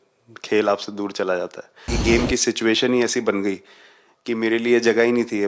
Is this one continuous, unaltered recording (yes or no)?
no